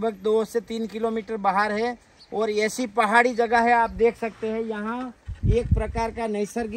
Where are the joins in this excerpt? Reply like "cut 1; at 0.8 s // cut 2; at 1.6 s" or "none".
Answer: none